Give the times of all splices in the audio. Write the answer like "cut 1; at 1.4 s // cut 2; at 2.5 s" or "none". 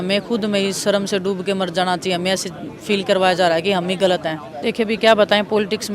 cut 1; at 4.5 s